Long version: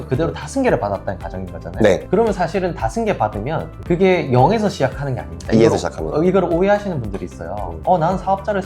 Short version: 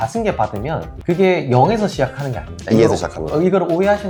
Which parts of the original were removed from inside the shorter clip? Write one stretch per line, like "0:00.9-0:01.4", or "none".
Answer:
none